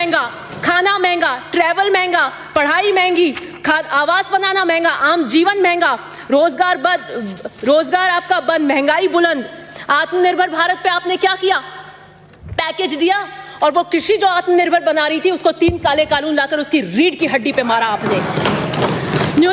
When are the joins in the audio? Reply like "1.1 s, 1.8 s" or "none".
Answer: none